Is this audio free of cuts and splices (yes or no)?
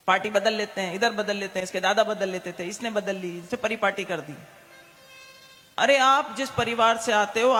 yes